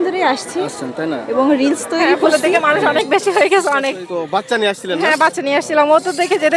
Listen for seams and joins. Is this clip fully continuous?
no; 1 cut; at 2.2 s

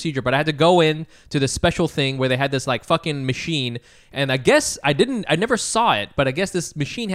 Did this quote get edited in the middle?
no; 0 cuts

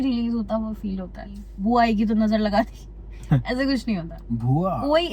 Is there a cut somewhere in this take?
yes; 1 cut; at 1.5 s

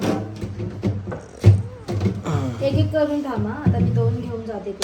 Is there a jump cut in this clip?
no; 0 cuts

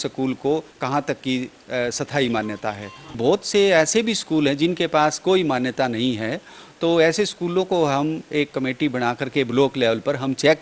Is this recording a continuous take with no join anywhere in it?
no; 1 cut; at 3.2 s

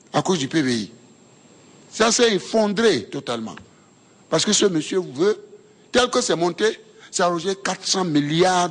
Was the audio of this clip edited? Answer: no; 0 cuts

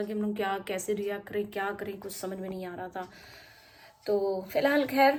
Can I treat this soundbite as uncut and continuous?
yes; 0 cuts

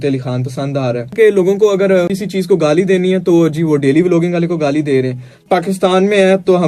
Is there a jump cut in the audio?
yes; 3 cuts; at 1.1 s, 2.2 s, 5.3 s

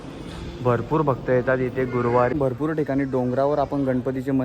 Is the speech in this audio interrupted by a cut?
yes; 1 cut; at 2.3 s

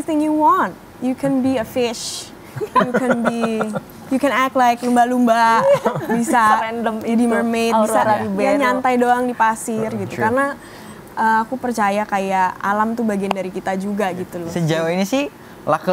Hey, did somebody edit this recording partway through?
yes; 1 cut; at 14.4 s

